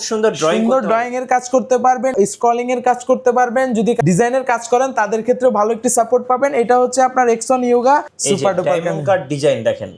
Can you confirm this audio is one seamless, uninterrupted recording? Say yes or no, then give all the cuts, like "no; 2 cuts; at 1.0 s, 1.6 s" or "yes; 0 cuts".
no; 3 cuts; at 2.1 s, 4.0 s, 8.1 s